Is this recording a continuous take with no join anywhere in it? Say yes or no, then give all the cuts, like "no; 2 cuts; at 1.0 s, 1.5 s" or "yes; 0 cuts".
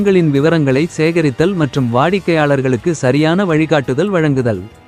yes; 0 cuts